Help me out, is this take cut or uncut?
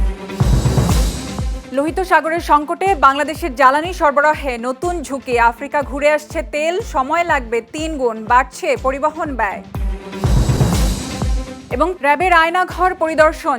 cut